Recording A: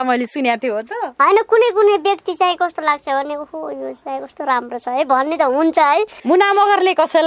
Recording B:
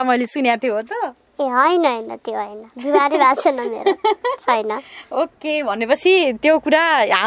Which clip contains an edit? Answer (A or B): A